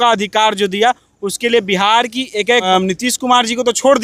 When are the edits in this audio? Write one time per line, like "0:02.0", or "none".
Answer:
0:02.7